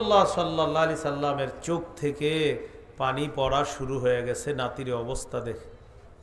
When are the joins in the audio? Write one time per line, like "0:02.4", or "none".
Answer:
none